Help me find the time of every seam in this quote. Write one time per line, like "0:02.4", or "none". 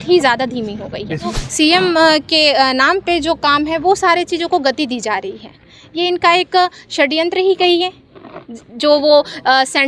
0:01.4